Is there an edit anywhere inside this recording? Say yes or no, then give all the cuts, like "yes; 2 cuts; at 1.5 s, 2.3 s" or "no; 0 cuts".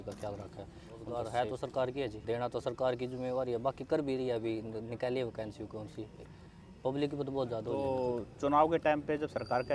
yes; 4 cuts; at 1.1 s, 2.2 s, 6.2 s, 7.8 s